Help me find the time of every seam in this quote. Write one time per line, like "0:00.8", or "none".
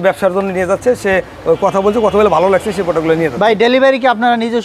none